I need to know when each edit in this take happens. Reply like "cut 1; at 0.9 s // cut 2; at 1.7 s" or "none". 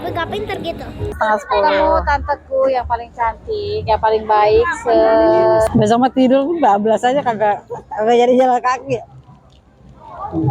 cut 1; at 1.2 s // cut 2; at 5.7 s